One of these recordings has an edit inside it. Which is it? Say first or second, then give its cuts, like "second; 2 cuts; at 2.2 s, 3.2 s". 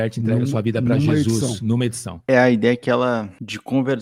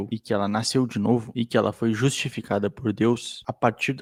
first; 1 cut; at 2.2 s